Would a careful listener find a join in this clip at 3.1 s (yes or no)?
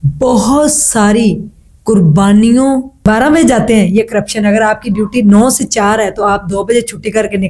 yes